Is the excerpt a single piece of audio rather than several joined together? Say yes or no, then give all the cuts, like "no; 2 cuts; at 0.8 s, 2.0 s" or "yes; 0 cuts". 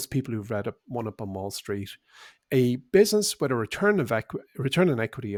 yes; 0 cuts